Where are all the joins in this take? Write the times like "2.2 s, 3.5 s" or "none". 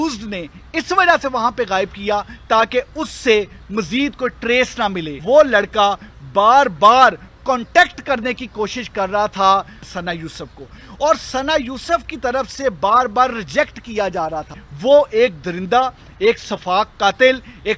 5.2 s, 9.9 s, 14.7 s